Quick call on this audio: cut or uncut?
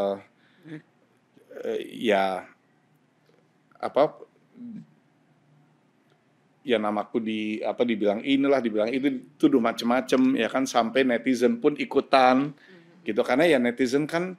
uncut